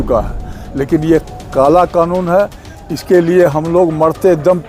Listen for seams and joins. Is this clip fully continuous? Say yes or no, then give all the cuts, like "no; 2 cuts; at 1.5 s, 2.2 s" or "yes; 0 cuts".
yes; 0 cuts